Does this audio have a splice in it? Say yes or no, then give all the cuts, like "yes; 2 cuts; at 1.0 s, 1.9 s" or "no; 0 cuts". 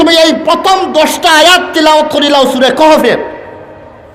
no; 0 cuts